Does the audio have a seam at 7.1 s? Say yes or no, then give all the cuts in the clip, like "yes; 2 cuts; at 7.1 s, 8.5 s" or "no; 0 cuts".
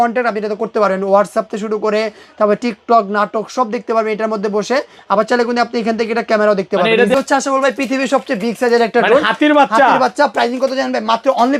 yes; 1 cut; at 7.1 s